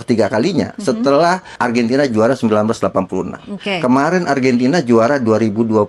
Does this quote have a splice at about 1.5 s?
yes; 1 cut; at 1.5 s

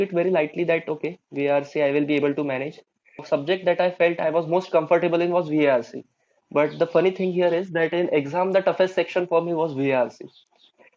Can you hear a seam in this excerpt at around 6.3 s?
no; 1 cut; at 3.2 s

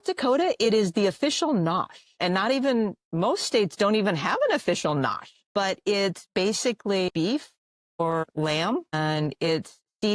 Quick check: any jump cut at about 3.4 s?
no; 1 cut; at 7.1 s

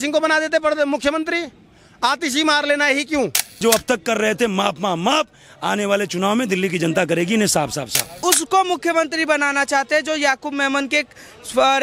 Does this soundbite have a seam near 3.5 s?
yes; 2 cuts; at 3.5 s, 8.2 s

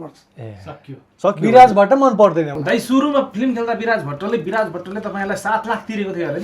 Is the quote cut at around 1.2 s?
no; 1 cut; at 2.5 s

